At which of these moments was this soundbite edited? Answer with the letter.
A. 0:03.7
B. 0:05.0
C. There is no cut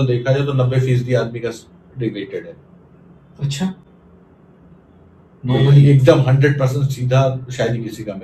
C